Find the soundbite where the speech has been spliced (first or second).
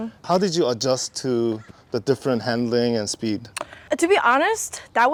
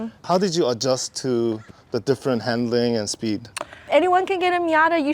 second